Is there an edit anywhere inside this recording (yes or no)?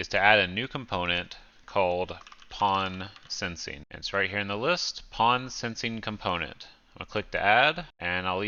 no